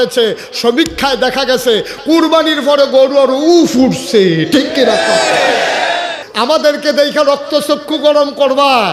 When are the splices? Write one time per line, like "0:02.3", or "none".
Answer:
0:06.2